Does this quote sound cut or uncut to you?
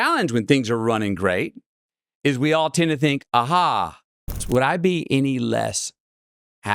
cut